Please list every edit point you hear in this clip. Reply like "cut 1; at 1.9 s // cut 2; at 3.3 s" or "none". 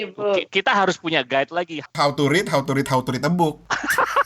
cut 1; at 1.9 s